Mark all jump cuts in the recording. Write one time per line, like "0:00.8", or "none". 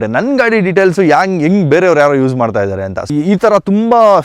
0:03.0